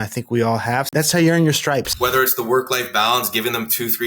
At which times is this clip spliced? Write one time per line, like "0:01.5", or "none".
0:00.9
0:01.9